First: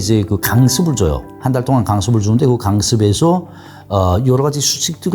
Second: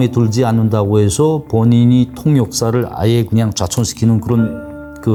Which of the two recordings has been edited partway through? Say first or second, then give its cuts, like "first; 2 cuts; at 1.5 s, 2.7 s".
first; 1 cut; at 1.3 s